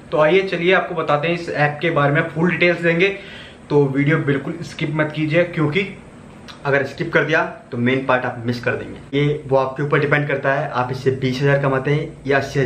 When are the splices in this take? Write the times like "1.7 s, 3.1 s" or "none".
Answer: 9.1 s